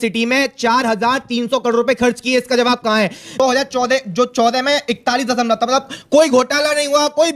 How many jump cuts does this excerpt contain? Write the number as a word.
one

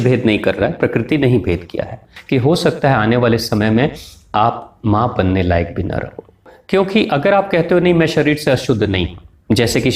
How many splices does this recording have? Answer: two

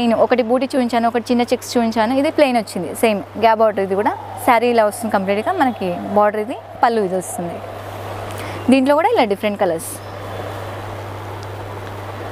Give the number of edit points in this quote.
zero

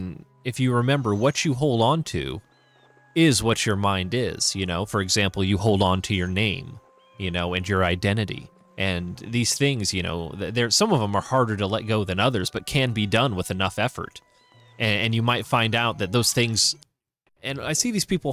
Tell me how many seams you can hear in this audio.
one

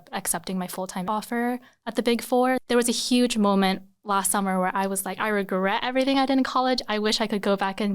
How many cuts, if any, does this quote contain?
two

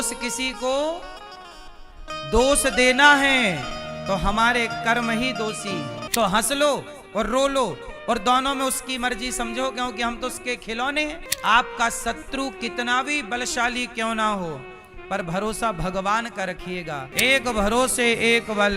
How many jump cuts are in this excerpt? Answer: three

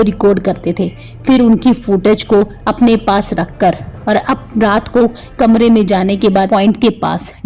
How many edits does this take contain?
one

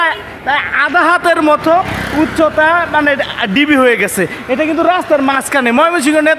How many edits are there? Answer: zero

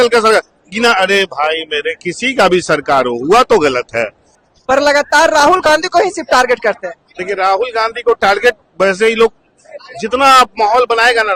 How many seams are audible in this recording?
zero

